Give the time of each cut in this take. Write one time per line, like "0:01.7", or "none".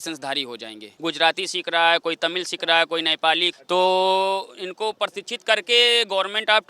0:00.9
0:03.5